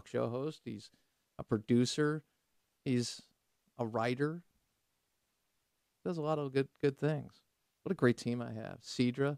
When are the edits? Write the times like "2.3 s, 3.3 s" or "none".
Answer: 5.0 s